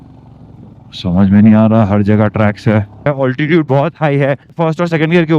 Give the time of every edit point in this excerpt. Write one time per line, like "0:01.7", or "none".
0:03.1